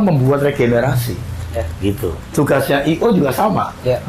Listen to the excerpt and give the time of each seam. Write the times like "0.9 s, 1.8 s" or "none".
2.3 s